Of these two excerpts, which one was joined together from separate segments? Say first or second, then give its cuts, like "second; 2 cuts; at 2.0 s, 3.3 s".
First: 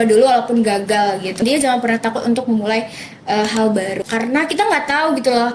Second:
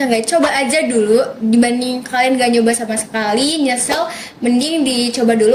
first; 2 cuts; at 1.4 s, 4.0 s